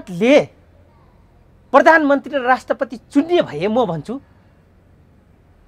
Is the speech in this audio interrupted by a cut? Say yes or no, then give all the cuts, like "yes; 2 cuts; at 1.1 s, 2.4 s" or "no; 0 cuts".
no; 0 cuts